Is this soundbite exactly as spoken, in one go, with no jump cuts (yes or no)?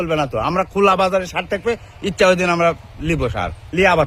yes